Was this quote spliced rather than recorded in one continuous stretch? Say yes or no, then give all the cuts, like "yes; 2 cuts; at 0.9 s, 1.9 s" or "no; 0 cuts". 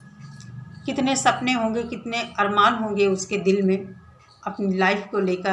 no; 0 cuts